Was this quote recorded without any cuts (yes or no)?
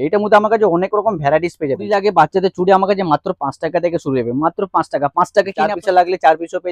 no